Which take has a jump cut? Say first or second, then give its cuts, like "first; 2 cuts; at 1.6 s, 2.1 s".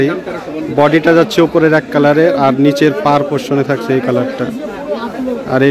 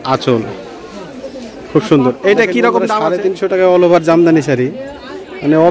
second; 1 cut; at 3.0 s